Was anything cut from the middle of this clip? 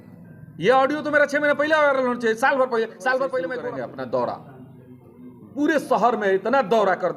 yes; 1 cut; at 3.6 s

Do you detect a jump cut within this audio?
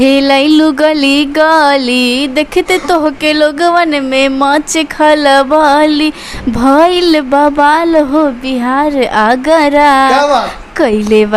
no; 0 cuts

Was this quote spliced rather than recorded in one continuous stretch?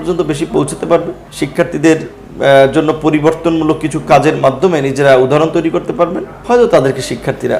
yes; 2 cuts; at 1.2 s, 6.3 s

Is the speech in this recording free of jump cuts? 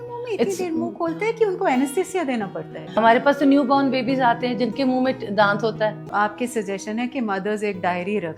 no; 2 cuts; at 3.0 s, 6.0 s

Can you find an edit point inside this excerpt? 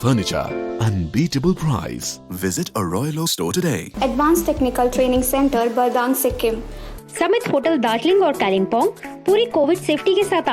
yes; 2 cuts; at 3.9 s, 6.8 s

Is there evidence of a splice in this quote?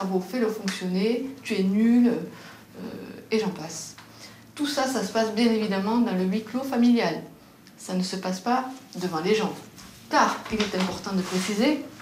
no; 0 cuts

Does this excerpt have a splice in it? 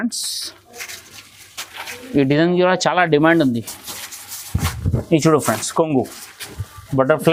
no; 0 cuts

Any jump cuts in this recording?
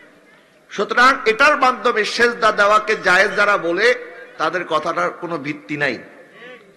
no; 0 cuts

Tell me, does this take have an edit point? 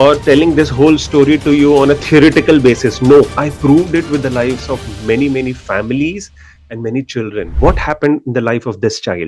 yes; 2 cuts; at 3.4 s, 7.5 s

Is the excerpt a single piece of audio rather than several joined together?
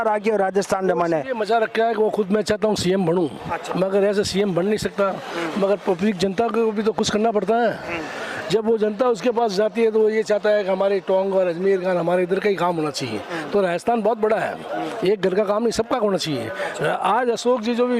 yes; 0 cuts

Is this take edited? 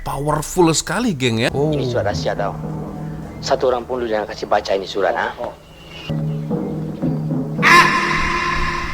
yes; 1 cut; at 1.5 s

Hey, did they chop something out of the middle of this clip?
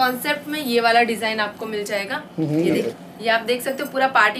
yes; 1 cut; at 2.9 s

